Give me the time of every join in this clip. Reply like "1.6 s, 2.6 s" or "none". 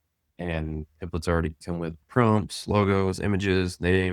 2.0 s